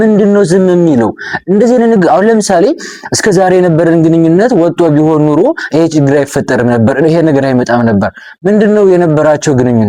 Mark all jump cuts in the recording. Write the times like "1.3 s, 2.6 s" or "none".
none

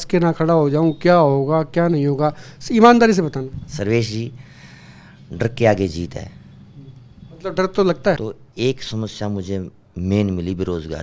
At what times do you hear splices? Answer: 8.2 s

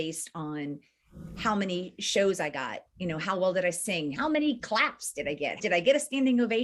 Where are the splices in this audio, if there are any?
4.1 s, 5.6 s

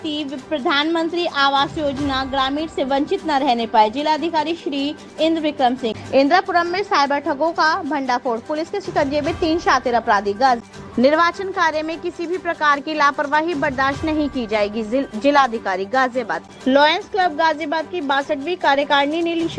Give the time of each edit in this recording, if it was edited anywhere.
6.0 s, 10.6 s, 16.4 s

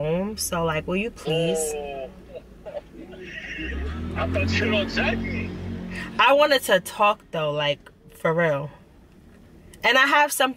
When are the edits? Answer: none

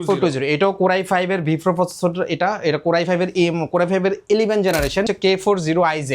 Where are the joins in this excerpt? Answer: 5.1 s

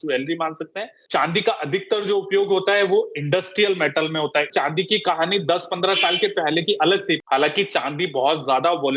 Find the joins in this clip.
1.0 s, 4.5 s, 7.2 s

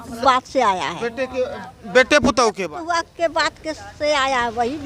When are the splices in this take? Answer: 2.7 s

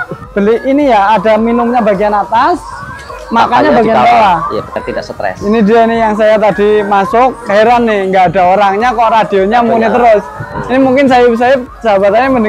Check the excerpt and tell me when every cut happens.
4.8 s

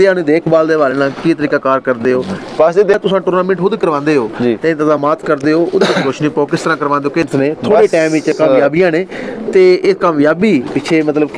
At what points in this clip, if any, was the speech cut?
2.9 s, 7.3 s

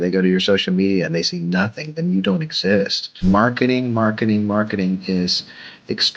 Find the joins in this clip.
3.2 s

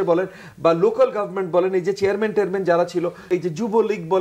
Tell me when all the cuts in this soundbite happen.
3.3 s

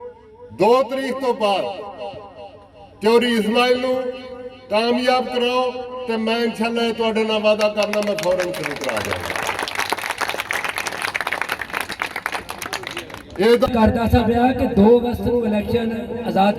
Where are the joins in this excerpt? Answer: 13.7 s

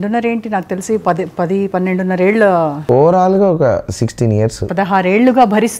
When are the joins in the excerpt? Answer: 2.8 s, 4.6 s

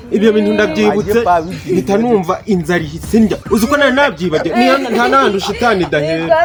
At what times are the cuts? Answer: none

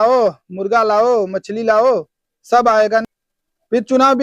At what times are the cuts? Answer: 3.1 s

